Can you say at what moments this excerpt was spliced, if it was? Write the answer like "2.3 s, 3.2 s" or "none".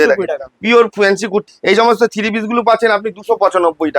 1.5 s